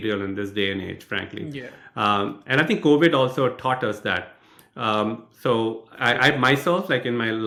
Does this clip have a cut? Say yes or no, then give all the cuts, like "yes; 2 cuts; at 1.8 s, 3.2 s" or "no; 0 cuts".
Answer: no; 0 cuts